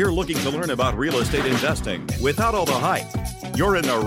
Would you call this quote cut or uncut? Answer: uncut